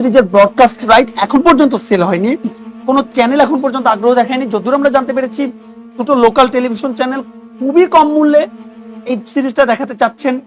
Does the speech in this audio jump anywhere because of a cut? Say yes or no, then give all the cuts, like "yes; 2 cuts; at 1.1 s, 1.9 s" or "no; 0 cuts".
no; 0 cuts